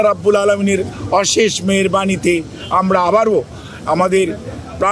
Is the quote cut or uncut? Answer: uncut